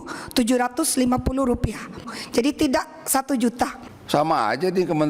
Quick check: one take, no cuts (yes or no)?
no